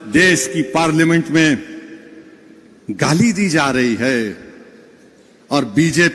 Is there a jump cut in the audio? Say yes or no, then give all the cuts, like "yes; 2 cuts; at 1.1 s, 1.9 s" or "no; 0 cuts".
no; 0 cuts